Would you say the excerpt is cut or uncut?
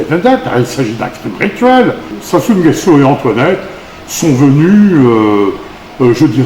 cut